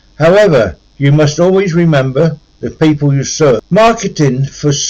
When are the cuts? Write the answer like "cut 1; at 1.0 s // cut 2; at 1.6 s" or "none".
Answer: cut 1; at 3.6 s

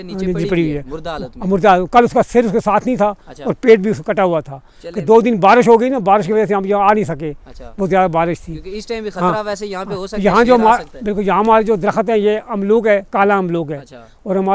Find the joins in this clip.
none

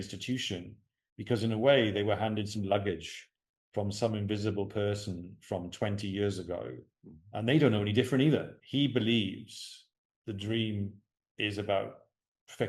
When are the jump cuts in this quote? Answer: cut 1; at 8.6 s

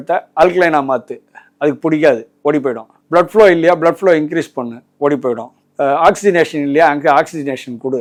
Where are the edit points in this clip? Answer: none

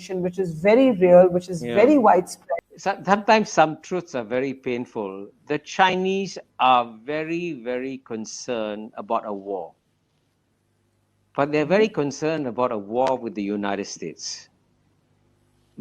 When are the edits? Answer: cut 1; at 2.4 s

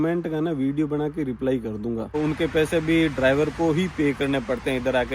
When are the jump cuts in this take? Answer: cut 1; at 2.2 s

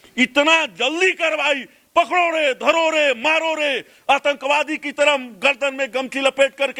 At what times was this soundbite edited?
none

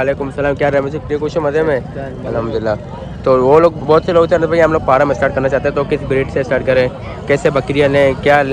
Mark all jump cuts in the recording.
none

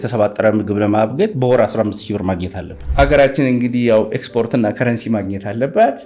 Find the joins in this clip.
cut 1; at 2.8 s

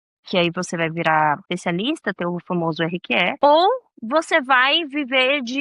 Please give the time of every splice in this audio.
cut 1; at 1.5 s // cut 2; at 3.4 s

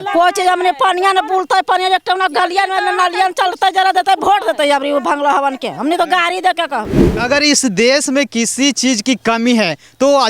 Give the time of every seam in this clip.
cut 1; at 7.2 s

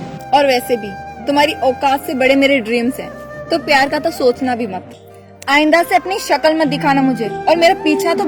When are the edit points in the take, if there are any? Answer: none

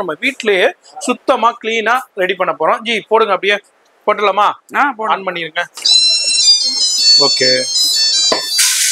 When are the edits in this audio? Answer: none

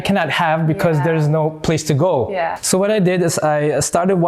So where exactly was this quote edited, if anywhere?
cut 1; at 2.5 s

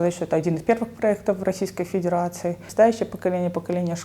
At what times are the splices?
cut 1; at 2.7 s

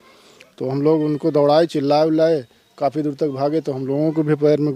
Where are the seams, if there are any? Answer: none

